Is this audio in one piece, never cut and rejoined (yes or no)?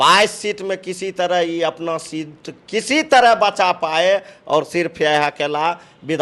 yes